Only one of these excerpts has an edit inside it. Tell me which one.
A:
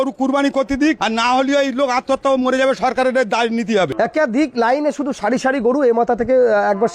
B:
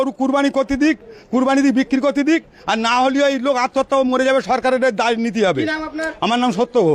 A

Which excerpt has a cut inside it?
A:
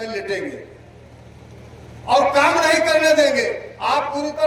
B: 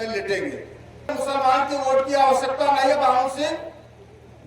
B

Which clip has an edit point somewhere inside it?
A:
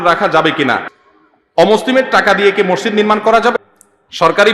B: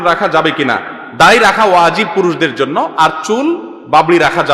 A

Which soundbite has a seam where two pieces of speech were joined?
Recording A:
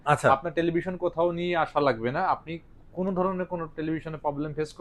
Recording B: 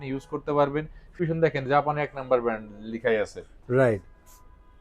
B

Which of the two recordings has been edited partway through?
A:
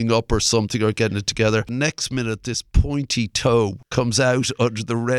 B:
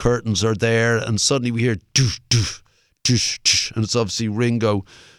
A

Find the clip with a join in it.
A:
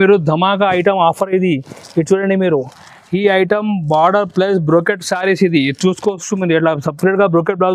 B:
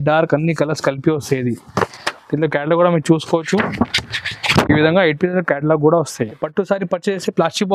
B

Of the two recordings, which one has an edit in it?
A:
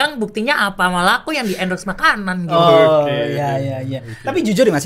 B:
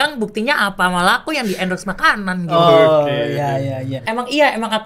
B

